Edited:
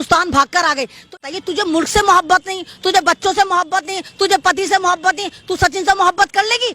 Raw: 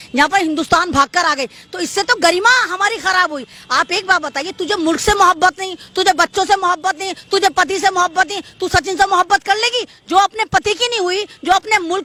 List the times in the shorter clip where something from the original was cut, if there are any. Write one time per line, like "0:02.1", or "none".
0:01.2